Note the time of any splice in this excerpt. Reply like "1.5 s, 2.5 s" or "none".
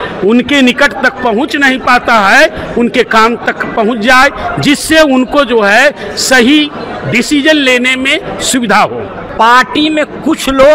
9.2 s